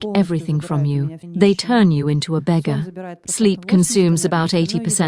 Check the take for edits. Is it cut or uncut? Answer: cut